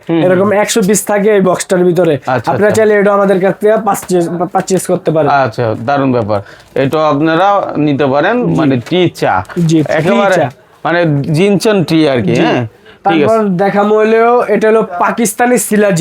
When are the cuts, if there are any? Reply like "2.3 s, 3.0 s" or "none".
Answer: none